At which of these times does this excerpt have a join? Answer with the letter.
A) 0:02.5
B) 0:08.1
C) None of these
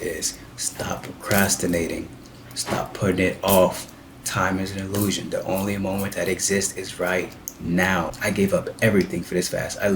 B